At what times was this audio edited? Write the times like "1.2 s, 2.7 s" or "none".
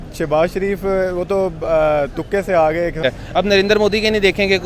3.0 s

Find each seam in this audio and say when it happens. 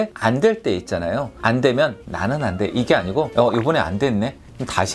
1.3 s

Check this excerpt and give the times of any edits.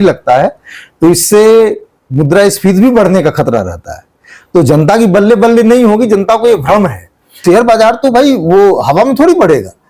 7.4 s

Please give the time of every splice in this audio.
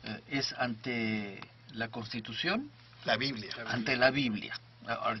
3.6 s

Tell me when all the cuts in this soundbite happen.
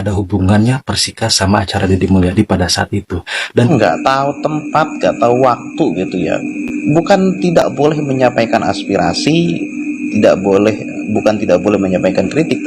3.7 s

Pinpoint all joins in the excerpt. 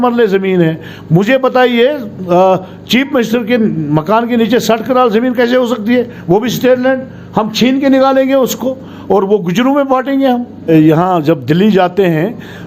10.7 s

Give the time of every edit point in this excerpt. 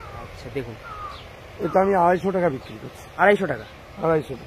none

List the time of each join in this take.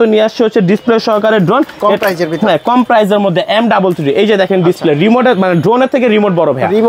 none

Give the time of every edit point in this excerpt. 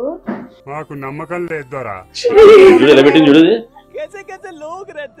2.1 s

